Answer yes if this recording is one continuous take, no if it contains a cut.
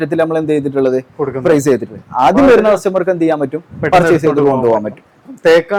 yes